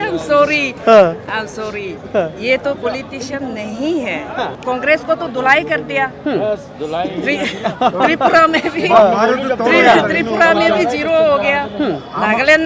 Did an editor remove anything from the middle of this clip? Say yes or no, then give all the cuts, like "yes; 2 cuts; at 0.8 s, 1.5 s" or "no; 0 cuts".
yes; 1 cut; at 4.6 s